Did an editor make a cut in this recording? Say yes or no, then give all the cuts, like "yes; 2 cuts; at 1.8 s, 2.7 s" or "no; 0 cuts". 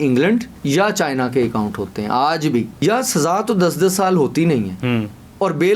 yes; 1 cut; at 2.7 s